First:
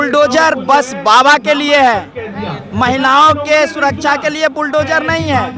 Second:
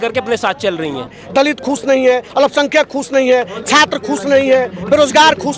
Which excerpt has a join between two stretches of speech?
second; 1 cut; at 1.2 s

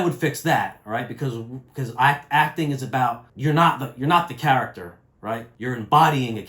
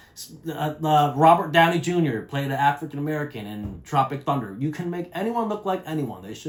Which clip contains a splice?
first; 2 cuts; at 3.3 s, 5.5 s

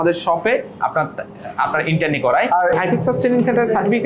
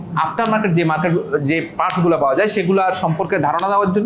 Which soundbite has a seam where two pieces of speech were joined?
first; 1 cut; at 2.7 s

